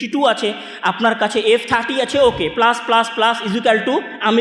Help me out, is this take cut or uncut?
uncut